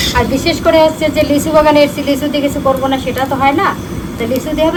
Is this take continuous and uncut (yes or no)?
yes